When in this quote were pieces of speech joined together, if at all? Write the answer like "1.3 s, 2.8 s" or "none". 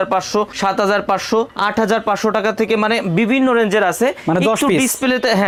none